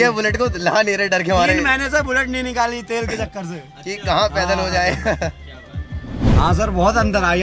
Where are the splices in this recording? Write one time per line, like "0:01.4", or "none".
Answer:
0:06.2